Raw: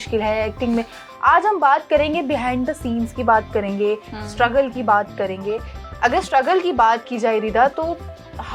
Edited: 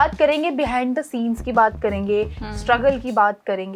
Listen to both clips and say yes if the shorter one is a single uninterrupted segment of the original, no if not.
yes